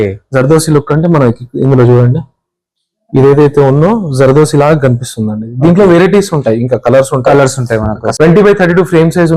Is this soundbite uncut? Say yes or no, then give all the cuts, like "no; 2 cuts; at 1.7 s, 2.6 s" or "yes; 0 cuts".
no; 1 cut; at 8.0 s